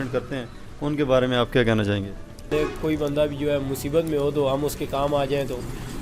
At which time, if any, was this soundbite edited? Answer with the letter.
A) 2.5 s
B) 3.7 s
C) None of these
A